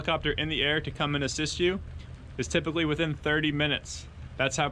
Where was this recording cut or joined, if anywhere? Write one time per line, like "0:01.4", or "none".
none